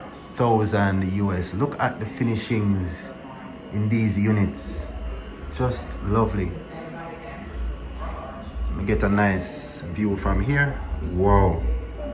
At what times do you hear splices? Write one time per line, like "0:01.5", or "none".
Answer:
none